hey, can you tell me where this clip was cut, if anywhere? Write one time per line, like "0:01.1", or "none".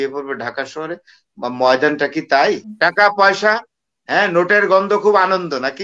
0:02.7